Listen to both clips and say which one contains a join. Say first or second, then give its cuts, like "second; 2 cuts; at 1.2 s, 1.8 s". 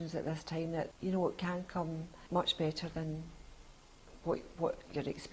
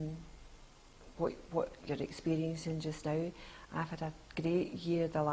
first; 2 cuts; at 0.9 s, 2.1 s